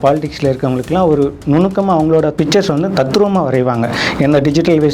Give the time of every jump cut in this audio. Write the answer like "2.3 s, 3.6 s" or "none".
2.3 s